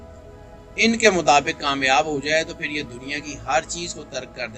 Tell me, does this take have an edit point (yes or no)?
no